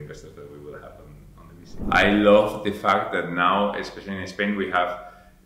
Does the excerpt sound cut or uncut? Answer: cut